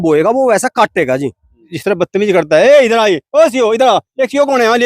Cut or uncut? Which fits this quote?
cut